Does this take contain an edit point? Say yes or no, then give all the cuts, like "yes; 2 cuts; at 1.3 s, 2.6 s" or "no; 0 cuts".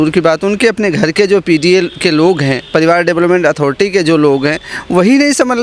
no; 0 cuts